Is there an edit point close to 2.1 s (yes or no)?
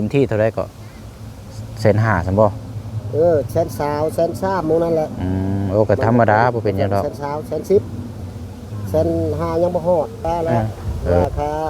no